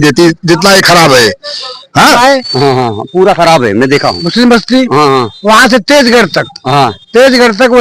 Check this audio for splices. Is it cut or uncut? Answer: cut